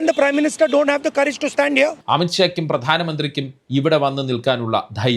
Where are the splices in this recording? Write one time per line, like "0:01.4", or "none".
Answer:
0:02.0